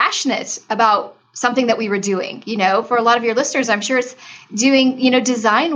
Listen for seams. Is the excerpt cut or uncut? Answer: uncut